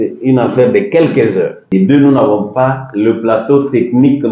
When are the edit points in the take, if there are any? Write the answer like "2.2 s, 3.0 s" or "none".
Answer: 1.6 s